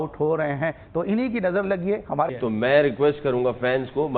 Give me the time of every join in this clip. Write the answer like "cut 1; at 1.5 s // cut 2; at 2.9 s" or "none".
cut 1; at 2.3 s